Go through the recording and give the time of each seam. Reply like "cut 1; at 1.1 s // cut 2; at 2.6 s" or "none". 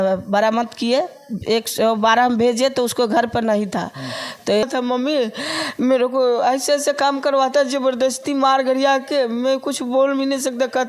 cut 1; at 4.6 s